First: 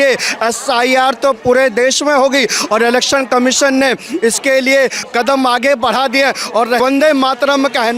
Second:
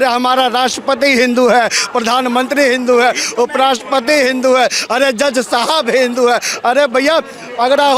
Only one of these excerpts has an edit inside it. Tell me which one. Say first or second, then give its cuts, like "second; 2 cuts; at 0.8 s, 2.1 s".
first; 1 cut; at 6.8 s